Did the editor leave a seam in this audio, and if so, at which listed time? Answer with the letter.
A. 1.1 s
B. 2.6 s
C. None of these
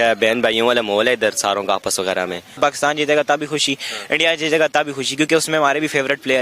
B